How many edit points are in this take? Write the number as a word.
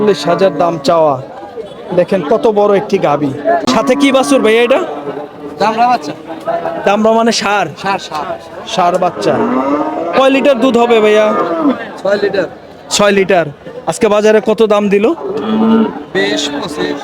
one